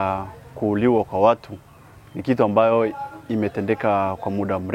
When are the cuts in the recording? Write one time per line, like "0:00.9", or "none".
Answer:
none